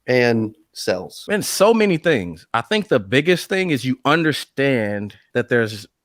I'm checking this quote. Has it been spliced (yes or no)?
yes